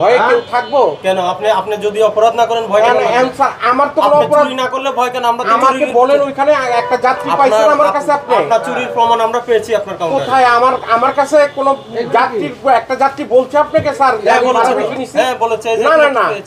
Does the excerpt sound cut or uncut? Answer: uncut